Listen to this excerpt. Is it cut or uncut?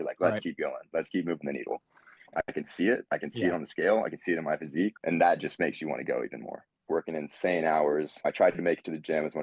cut